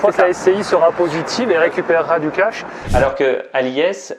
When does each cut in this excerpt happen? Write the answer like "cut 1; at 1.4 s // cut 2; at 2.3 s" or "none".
cut 1; at 2.8 s